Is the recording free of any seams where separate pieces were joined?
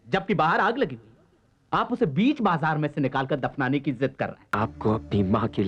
no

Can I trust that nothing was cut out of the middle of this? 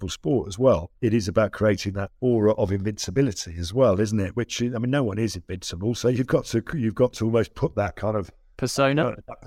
no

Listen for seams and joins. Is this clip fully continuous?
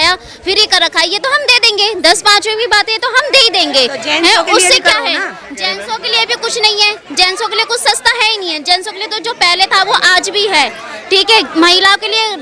yes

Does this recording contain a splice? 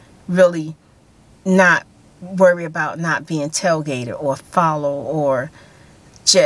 no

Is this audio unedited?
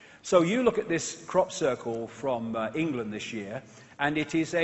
yes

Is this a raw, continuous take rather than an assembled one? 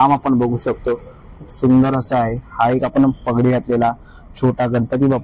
yes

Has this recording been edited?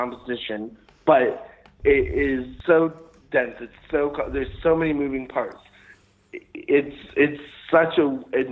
yes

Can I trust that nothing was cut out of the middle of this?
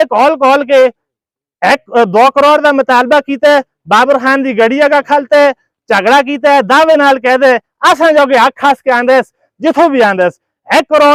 yes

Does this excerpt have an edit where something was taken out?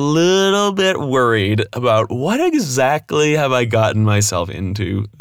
no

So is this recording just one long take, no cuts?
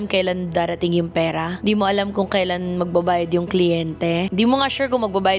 yes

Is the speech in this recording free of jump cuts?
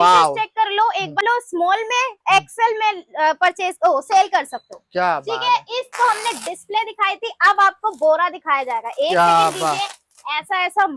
no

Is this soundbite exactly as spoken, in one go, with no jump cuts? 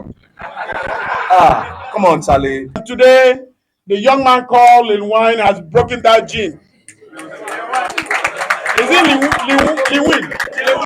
no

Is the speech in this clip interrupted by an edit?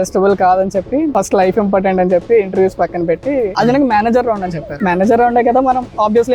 yes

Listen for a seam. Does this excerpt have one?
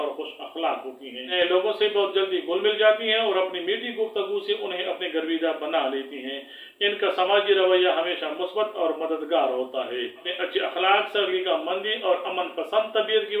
no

